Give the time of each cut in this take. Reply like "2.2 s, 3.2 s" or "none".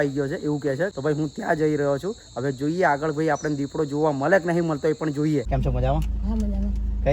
0.9 s, 5.5 s